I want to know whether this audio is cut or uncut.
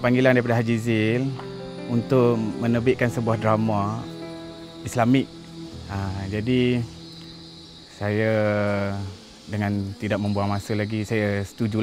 uncut